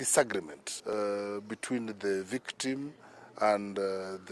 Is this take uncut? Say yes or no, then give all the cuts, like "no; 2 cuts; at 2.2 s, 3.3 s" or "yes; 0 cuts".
no; 1 cut; at 0.9 s